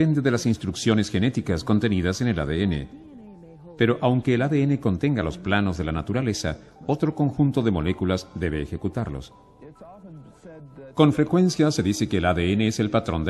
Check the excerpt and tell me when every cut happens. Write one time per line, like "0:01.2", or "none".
0:09.6